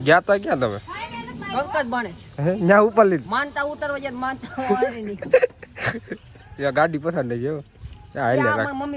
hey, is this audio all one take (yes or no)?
yes